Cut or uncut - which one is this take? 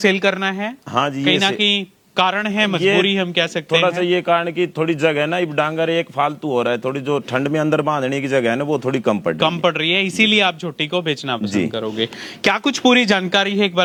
uncut